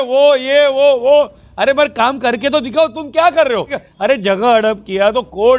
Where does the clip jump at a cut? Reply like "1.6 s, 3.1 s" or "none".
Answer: 3.8 s